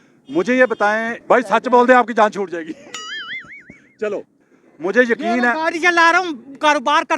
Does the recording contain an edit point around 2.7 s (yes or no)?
no